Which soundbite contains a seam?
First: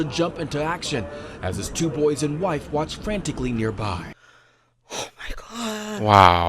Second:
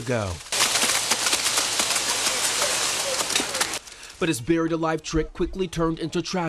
first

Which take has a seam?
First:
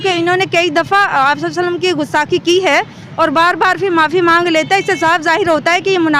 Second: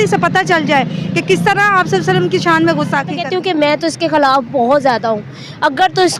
second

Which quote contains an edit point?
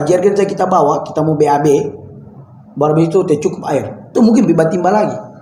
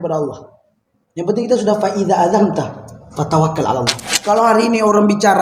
second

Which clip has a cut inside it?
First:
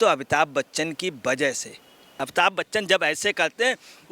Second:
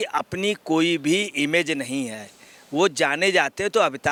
first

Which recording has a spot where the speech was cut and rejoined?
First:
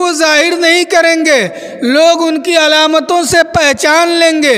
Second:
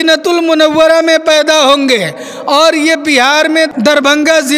second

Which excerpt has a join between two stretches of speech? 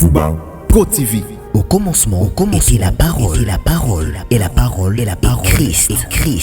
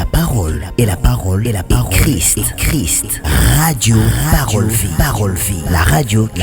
first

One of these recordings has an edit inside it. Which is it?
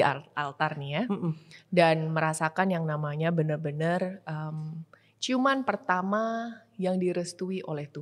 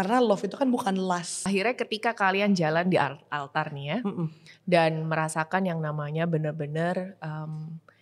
second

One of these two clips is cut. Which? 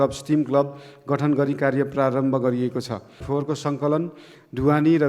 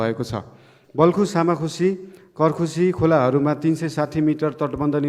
first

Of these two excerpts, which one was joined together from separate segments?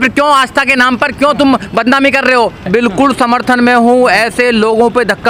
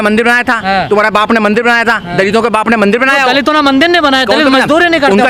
first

